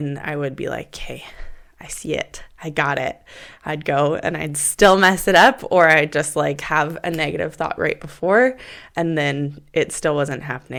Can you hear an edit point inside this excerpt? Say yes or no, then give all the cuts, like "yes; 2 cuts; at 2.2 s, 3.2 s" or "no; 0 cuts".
no; 0 cuts